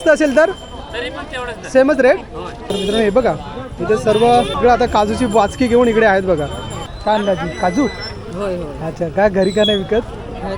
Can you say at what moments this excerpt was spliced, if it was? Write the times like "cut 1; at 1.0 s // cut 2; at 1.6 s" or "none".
cut 1; at 2.7 s // cut 2; at 6.9 s